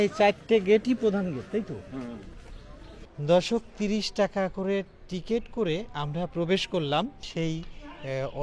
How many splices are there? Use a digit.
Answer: 2